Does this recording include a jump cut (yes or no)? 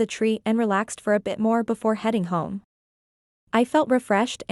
no